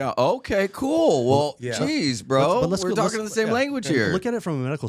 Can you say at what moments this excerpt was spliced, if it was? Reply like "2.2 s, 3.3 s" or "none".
none